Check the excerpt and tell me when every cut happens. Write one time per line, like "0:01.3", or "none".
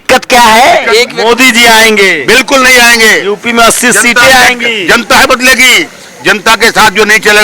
0:01.1